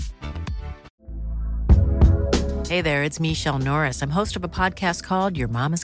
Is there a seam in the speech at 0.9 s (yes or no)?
yes